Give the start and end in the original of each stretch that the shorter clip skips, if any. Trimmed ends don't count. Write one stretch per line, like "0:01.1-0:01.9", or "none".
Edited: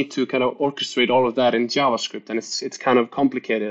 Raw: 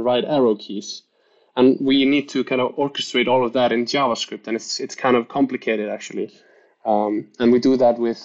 none